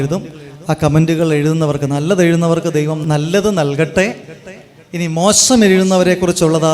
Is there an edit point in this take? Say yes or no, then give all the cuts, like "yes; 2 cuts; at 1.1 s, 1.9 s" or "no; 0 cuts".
yes; 2 cuts; at 1.0 s, 3.0 s